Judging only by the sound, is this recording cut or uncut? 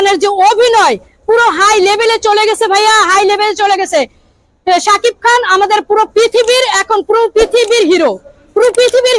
uncut